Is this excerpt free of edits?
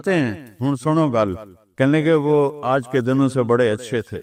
yes; 0 cuts

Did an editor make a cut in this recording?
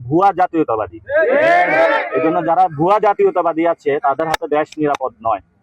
no; 0 cuts

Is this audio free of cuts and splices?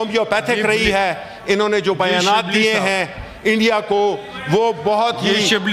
yes; 0 cuts

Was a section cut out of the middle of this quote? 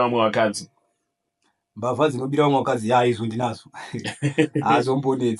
no; 0 cuts

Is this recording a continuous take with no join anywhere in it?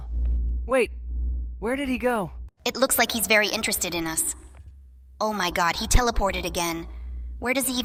yes; 0 cuts

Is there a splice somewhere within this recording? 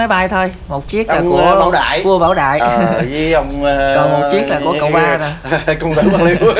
no; 0 cuts

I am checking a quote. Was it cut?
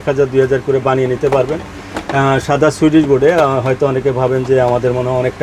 no; 0 cuts

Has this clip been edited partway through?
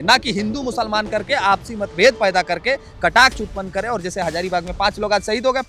no; 0 cuts

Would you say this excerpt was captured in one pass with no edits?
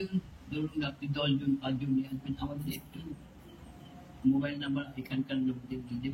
yes; 0 cuts

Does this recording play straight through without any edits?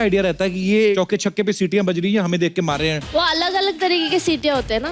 no; 2 cuts; at 0.9 s, 3.1 s

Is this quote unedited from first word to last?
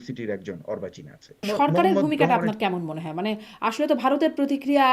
no; 1 cut; at 1.4 s

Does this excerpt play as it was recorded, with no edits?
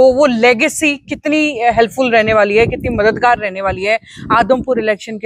yes; 0 cuts

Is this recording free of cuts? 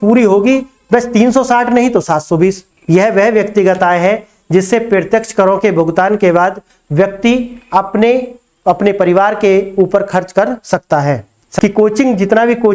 no; 2 cuts; at 2.7 s, 11.5 s

